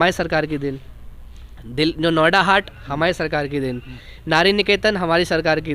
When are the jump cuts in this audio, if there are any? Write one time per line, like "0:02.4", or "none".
none